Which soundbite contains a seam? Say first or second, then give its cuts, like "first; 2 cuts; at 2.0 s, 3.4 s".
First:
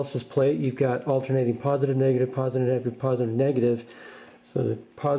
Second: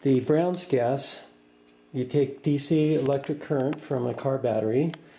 second; 1 cut; at 3.1 s